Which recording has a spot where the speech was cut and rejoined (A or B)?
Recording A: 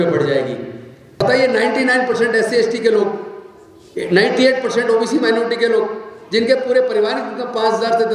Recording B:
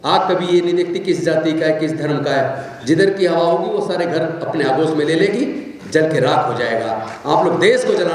A